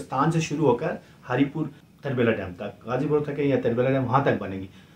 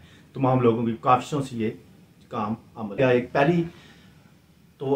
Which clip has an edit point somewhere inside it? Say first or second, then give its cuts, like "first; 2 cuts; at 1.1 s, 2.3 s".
second; 1 cut; at 3.0 s